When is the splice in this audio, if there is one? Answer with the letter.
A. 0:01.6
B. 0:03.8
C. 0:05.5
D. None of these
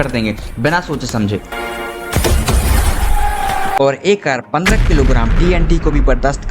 B